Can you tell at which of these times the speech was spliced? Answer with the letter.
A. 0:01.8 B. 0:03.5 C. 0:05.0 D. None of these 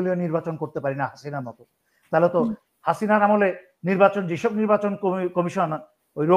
D